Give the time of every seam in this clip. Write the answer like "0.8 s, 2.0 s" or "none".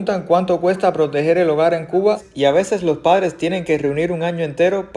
2.3 s